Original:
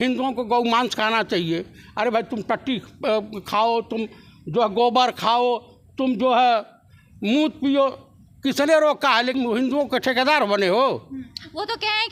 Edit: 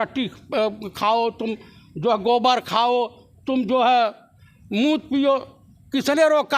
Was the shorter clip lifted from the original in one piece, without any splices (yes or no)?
yes